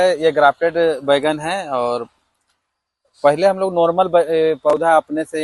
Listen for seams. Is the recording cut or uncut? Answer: uncut